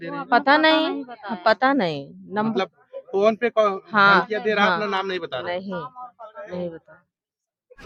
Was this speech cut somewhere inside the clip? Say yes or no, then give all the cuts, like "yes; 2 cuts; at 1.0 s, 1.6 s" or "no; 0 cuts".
no; 0 cuts